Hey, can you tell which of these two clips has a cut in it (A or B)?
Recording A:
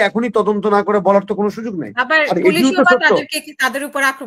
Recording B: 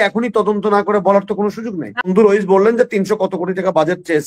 B